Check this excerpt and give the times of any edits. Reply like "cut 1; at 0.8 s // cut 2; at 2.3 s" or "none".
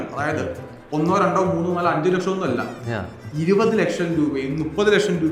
none